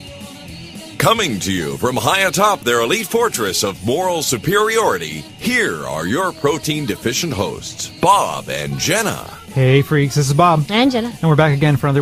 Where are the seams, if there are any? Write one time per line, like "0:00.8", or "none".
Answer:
none